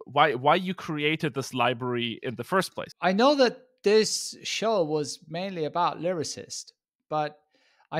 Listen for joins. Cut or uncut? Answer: cut